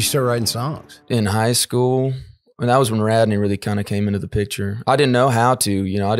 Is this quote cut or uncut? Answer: cut